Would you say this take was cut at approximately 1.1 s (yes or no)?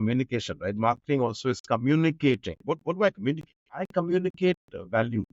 no